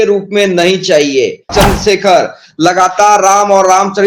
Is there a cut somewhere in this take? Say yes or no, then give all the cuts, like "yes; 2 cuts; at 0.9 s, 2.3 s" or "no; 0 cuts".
yes; 1 cut; at 1.5 s